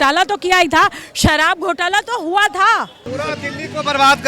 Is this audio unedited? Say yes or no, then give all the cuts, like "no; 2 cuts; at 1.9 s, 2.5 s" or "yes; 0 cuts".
no; 1 cut; at 3.0 s